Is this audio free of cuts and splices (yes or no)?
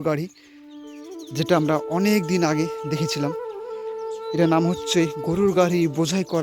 yes